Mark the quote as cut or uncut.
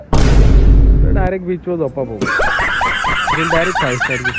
uncut